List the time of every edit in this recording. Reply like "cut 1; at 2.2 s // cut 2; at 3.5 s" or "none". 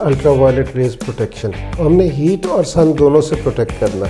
cut 1; at 1.7 s